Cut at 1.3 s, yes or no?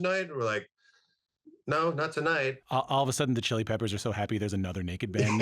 no